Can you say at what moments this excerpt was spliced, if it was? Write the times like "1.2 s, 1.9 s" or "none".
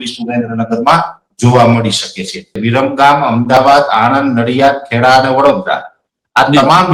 2.5 s